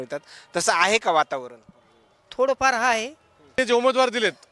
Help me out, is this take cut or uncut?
cut